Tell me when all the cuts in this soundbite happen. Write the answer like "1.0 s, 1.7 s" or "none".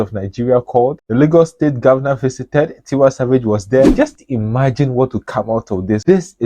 3.9 s

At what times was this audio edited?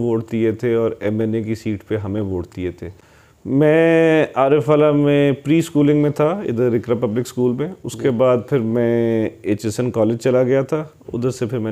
2.9 s

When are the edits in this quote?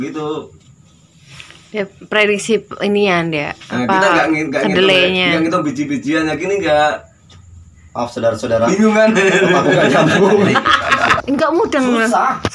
11.1 s

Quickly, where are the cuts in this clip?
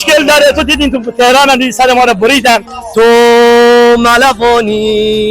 2.8 s

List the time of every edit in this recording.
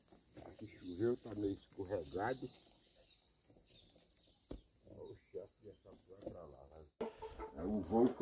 7.0 s

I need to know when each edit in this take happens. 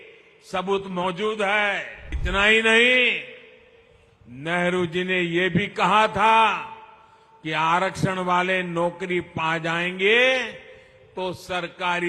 2.2 s

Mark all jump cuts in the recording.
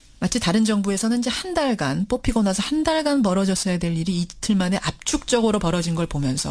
1.9 s

